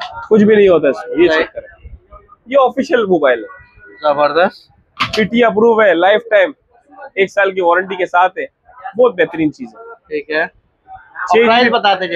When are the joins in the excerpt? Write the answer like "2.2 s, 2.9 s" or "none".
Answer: none